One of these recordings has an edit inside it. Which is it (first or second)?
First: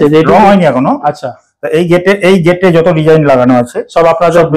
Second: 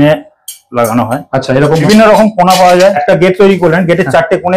second